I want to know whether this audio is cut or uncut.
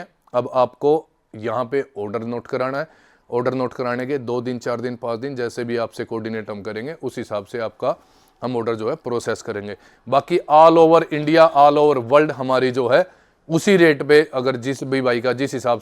uncut